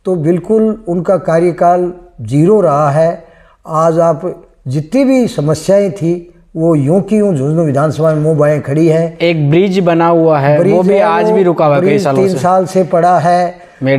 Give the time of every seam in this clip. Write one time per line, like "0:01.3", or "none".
none